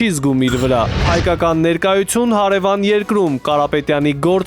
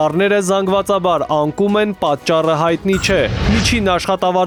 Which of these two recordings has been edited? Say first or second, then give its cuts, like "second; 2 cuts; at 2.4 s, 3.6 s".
first; 1 cut; at 1.1 s